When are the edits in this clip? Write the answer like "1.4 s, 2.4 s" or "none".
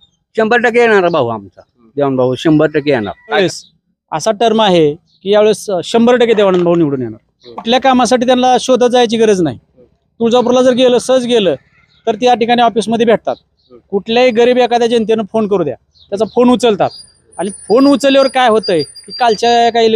3.4 s, 7.6 s